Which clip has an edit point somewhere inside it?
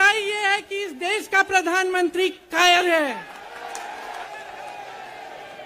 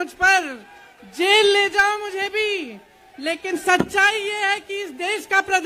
first; 1 cut; at 4.2 s

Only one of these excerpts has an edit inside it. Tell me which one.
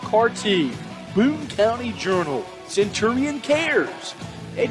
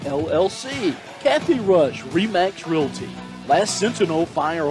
second; 1 cut; at 1.1 s

